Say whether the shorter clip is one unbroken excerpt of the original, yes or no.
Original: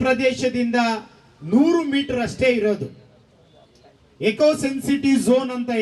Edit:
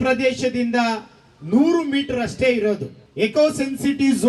no